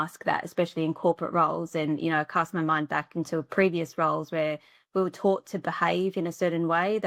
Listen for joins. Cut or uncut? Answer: uncut